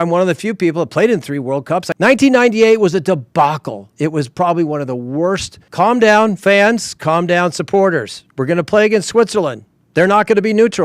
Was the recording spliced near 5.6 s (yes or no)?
yes